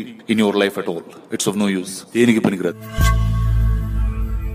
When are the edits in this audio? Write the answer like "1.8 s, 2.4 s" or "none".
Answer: 2.8 s